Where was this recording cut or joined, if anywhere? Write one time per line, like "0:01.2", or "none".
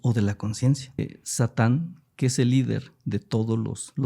0:01.0